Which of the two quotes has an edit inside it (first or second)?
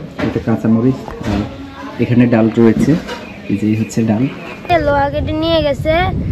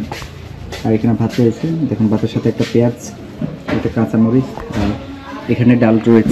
first